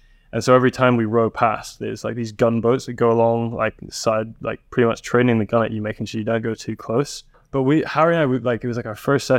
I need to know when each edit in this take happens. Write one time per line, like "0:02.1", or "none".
0:07.4

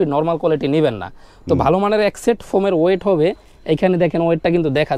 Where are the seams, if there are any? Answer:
none

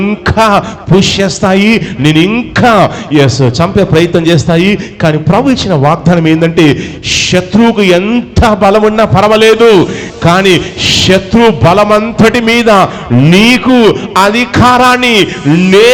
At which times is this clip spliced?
none

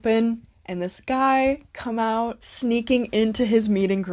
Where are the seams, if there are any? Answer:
0:02.4

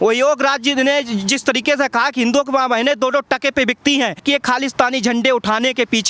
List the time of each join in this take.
0:04.2

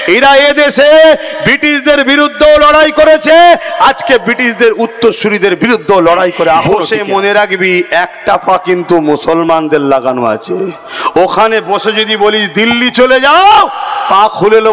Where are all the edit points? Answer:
0:06.6

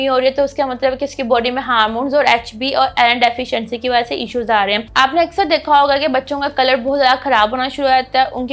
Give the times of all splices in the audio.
0:04.9

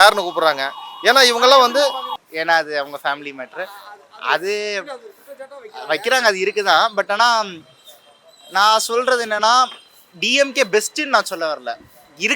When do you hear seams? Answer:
0:02.1

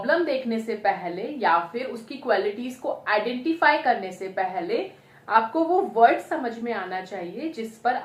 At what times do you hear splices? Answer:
none

